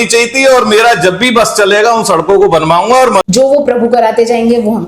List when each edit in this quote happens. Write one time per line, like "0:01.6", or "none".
0:03.2